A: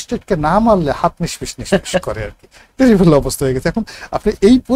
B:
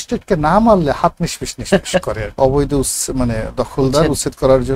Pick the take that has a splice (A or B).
B